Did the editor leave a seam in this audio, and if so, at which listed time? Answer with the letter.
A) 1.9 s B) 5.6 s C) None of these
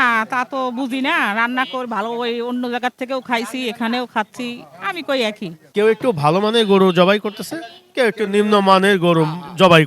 B